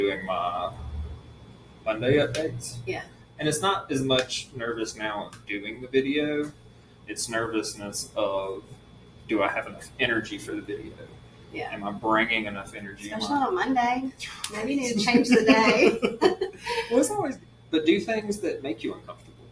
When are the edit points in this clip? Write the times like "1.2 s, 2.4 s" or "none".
17.2 s